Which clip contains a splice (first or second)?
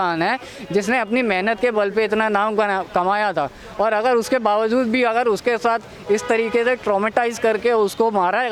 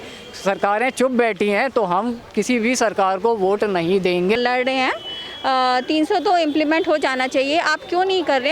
second